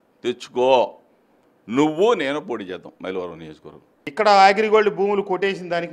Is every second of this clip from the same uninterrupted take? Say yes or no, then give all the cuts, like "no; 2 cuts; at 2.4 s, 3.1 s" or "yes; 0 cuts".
no; 1 cut; at 4.1 s